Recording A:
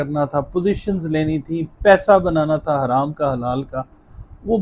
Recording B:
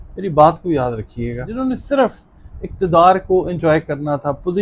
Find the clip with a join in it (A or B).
B